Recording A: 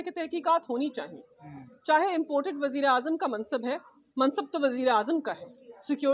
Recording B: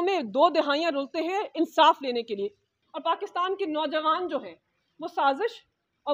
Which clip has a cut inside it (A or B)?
B